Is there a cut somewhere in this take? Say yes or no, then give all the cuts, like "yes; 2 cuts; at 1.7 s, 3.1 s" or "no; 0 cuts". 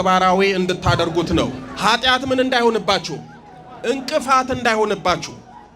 yes; 1 cut; at 1.6 s